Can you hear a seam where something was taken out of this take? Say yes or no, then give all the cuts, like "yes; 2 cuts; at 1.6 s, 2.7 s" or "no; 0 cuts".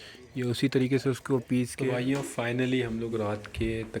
yes; 1 cut; at 1.8 s